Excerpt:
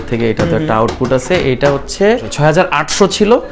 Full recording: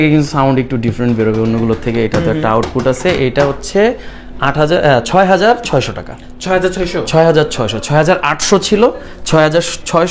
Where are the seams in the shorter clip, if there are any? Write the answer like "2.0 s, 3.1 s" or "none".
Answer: 2.3 s